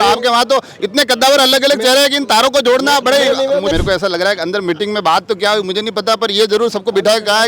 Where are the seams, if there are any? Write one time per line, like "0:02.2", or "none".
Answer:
0:03.7